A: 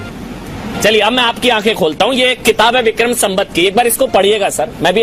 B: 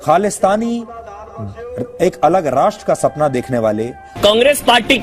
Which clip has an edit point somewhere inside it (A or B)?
B